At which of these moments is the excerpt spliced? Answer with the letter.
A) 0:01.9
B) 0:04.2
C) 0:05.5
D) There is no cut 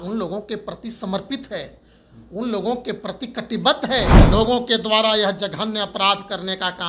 B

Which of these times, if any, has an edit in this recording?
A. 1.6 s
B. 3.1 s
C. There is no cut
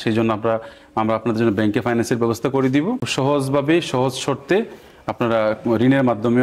B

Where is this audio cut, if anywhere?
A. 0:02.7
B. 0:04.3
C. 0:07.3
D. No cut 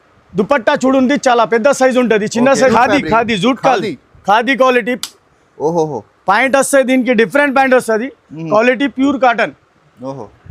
A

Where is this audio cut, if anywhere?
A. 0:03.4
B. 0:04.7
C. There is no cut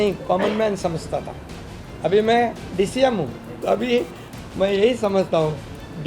A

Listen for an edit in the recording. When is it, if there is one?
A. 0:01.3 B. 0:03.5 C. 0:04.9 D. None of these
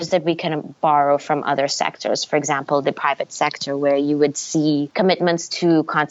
C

